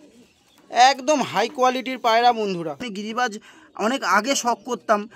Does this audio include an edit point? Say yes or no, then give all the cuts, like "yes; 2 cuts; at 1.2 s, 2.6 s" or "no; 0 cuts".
yes; 1 cut; at 2.9 s